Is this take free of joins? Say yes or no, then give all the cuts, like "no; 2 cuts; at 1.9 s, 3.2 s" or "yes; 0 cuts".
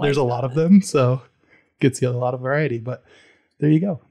yes; 0 cuts